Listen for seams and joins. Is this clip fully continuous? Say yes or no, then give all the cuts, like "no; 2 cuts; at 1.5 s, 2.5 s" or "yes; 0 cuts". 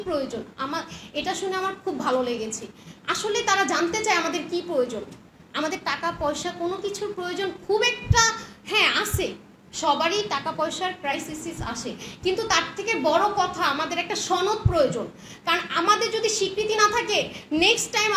yes; 0 cuts